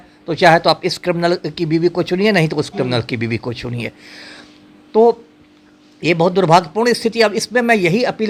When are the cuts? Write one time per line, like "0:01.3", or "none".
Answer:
none